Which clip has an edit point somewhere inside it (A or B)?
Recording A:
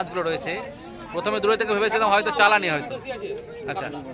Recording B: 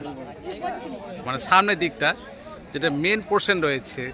B